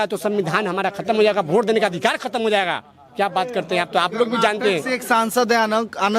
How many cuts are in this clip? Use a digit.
0